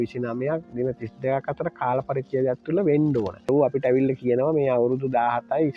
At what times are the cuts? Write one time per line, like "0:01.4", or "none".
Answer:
0:03.5